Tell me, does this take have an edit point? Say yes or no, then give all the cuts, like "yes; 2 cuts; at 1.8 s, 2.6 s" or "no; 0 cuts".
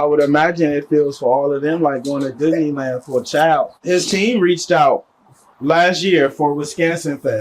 yes; 1 cut; at 3.8 s